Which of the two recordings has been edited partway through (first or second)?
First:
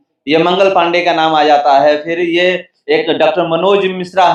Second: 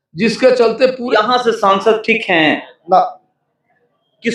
second